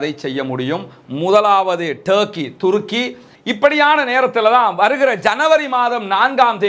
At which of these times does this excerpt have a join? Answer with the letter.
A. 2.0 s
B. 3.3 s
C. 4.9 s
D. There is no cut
B